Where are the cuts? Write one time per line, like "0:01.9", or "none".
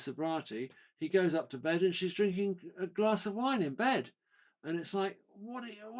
none